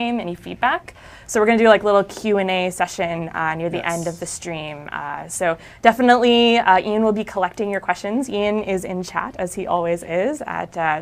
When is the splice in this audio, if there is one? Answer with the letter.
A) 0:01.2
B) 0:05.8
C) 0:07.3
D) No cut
A